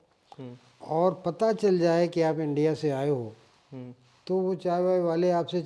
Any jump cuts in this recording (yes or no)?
no